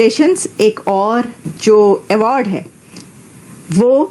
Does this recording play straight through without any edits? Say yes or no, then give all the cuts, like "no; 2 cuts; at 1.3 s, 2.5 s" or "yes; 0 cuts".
no; 1 cut; at 1.4 s